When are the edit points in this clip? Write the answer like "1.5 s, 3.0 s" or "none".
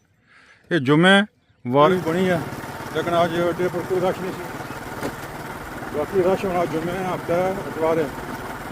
1.9 s